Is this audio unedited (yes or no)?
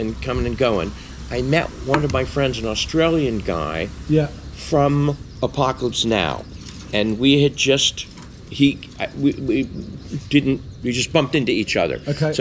yes